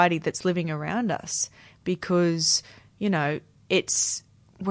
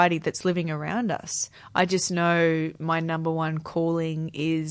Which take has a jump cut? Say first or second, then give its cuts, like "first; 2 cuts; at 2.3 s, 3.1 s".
second; 1 cut; at 1.6 s